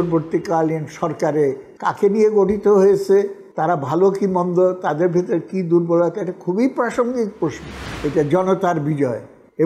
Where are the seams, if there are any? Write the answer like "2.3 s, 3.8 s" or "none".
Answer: 3.4 s, 7.8 s